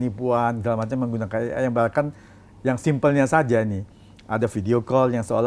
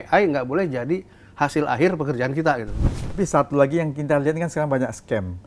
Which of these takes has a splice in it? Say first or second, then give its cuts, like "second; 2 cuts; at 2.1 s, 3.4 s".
second; 1 cut; at 3.1 s